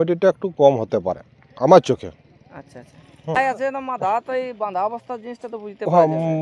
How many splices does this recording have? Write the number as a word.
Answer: one